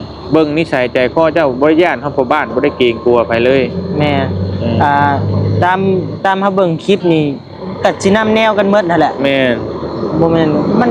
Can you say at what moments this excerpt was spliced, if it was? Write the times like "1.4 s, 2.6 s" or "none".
none